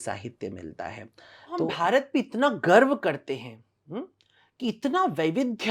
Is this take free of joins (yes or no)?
no